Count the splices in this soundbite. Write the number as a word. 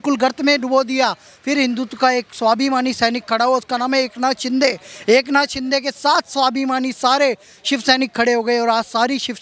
zero